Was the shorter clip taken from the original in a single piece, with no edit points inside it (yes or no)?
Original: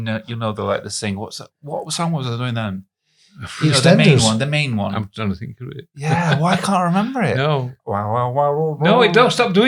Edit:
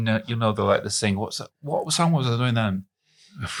yes